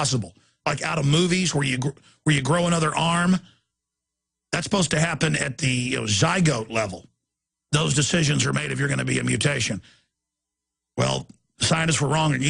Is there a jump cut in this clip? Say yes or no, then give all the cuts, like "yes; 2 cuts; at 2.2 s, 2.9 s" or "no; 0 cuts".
no; 0 cuts